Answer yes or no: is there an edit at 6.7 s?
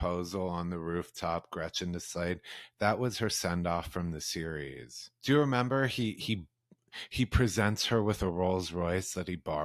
no